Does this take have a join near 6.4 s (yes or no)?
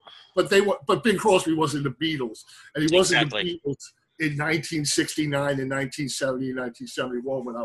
no